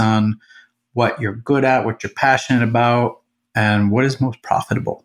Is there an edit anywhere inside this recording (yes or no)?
no